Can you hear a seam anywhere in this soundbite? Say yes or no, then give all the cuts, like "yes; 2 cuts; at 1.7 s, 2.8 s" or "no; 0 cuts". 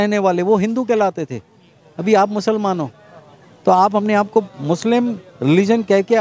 no; 0 cuts